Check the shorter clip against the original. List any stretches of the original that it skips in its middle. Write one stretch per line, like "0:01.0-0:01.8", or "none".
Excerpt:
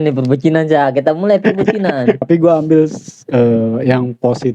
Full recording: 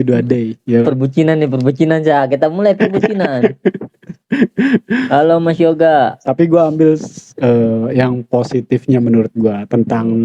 0:03.6-0:06.3